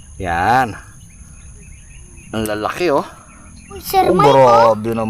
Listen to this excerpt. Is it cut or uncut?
cut